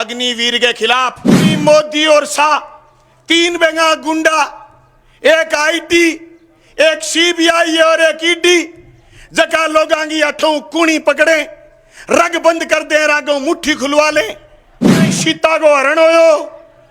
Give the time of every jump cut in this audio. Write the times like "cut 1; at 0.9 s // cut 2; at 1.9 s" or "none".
cut 1; at 1.4 s // cut 2; at 15.1 s